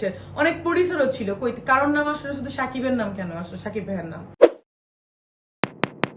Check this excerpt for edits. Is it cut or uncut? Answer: uncut